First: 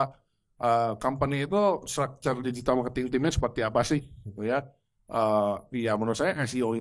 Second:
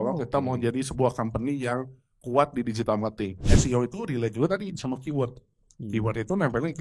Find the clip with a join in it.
second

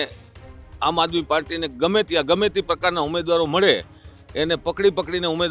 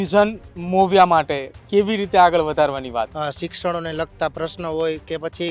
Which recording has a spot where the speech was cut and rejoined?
second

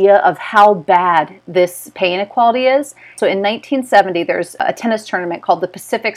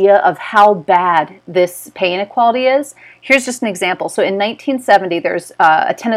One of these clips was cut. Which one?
first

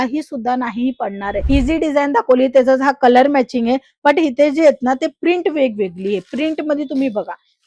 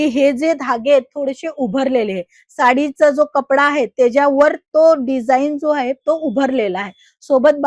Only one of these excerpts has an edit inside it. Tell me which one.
first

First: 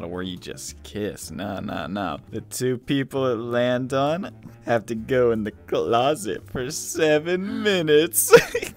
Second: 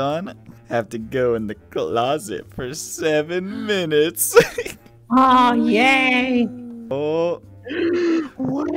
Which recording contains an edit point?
second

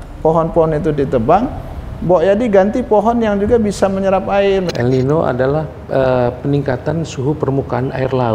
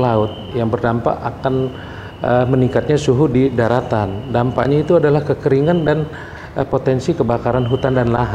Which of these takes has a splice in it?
first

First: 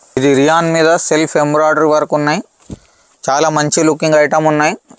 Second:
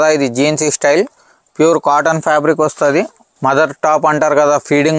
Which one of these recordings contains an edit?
second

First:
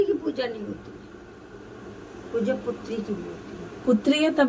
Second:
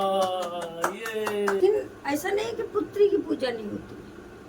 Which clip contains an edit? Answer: second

